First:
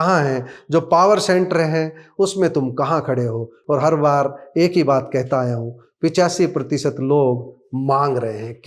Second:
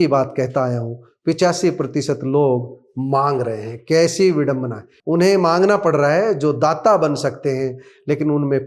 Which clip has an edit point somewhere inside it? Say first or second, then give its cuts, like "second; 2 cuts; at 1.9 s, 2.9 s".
first; 1 cut; at 3.5 s